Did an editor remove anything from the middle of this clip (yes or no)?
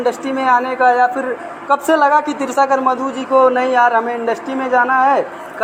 no